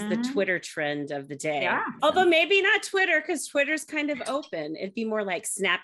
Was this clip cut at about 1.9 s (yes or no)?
yes